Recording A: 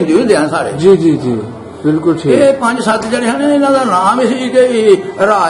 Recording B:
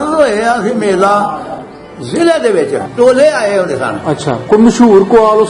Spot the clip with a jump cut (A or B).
B